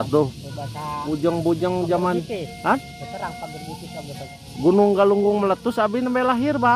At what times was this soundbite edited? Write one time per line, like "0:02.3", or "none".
0:04.3